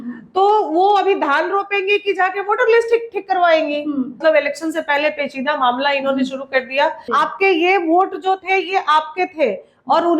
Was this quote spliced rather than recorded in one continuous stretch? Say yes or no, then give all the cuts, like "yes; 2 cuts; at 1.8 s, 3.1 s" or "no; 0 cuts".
yes; 2 cuts; at 4.2 s, 7.0 s